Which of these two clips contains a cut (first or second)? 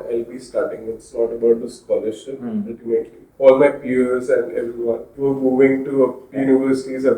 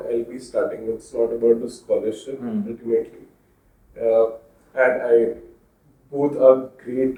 first